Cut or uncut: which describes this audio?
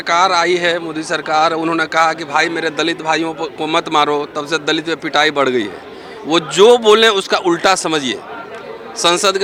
uncut